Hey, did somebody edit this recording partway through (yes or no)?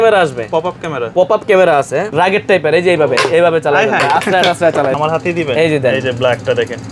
yes